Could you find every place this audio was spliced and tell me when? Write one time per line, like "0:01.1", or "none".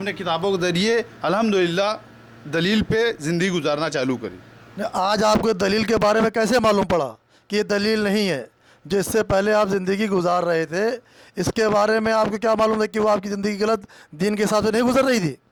none